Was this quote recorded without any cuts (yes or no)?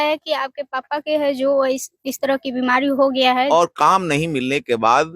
no